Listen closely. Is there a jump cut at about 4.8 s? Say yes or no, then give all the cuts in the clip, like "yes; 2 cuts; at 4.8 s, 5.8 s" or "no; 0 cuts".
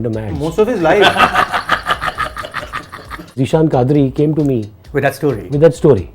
yes; 2 cuts; at 3.4 s, 4.8 s